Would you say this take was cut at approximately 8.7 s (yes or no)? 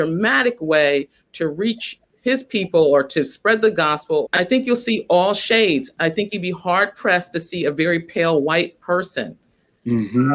no